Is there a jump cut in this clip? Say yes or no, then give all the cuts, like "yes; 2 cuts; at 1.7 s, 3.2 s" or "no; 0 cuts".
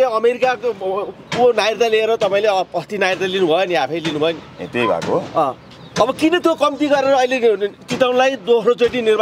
no; 0 cuts